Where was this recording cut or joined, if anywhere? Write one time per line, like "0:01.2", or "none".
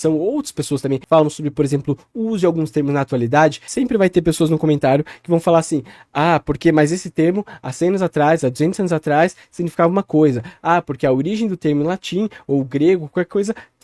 0:01.0
0:03.6